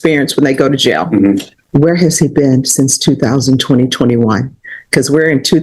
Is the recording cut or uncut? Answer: cut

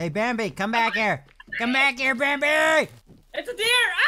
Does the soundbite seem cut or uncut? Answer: cut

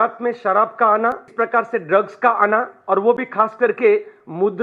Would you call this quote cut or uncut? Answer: cut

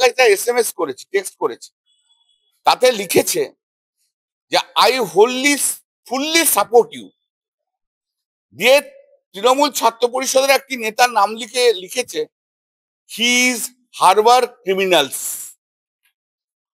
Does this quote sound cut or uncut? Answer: uncut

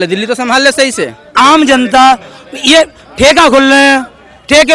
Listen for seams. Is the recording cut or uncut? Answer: cut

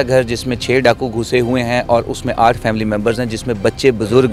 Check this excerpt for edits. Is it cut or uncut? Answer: uncut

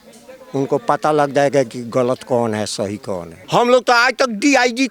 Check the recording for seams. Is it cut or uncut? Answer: cut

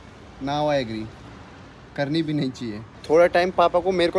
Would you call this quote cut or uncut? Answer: cut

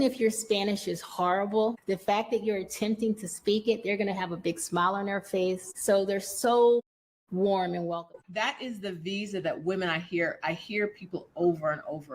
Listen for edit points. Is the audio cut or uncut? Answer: cut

